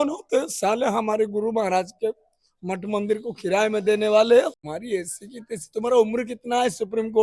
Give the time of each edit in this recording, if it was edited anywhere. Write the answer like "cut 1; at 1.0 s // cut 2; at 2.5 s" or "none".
cut 1; at 4.7 s